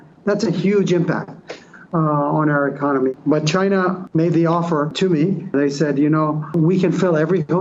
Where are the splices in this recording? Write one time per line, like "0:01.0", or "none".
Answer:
0:03.1
0:04.0
0:05.5
0:06.5